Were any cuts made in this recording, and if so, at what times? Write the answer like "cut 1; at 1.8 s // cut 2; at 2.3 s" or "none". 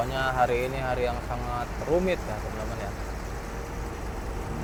none